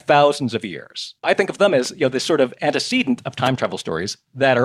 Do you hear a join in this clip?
yes; 1 cut; at 1.2 s

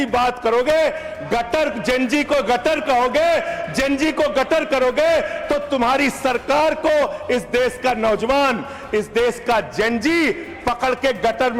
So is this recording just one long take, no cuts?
yes; 0 cuts

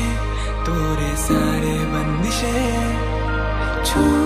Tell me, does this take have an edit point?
no; 0 cuts

